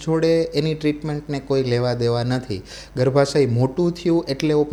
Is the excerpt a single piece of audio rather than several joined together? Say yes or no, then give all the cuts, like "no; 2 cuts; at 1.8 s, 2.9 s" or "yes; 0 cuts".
yes; 0 cuts